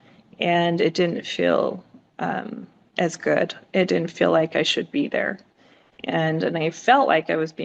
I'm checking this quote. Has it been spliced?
no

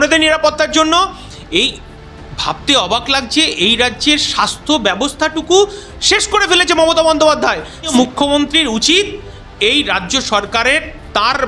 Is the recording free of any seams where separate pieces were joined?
no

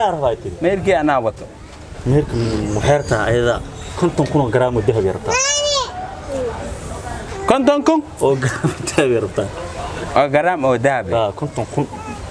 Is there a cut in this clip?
no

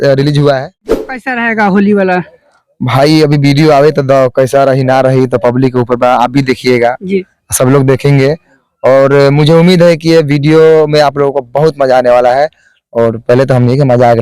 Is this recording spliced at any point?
yes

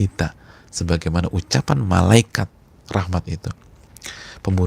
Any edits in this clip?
no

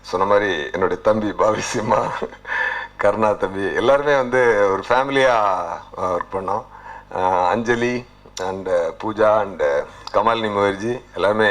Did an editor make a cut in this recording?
no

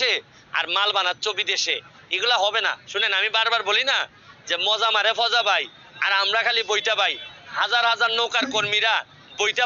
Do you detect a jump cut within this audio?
no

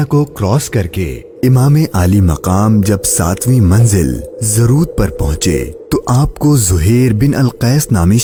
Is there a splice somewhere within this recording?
no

